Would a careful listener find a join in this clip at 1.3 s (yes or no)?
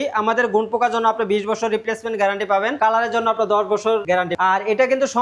no